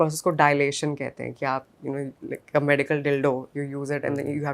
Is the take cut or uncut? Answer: uncut